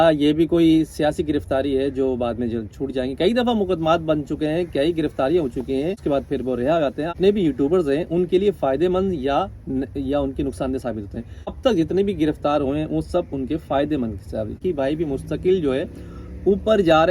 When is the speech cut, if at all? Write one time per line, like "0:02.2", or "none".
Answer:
0:06.0
0:07.2
0:11.6
0:14.6